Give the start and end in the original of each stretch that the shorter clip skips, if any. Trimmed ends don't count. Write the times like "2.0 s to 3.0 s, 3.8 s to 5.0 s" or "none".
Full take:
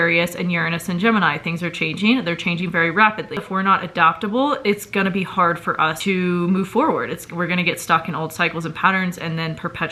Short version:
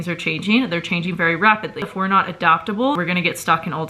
4.5 s to 7.4 s